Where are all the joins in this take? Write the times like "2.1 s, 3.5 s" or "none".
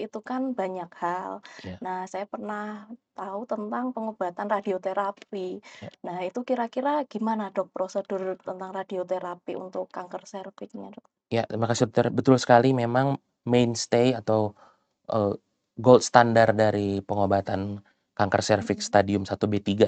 none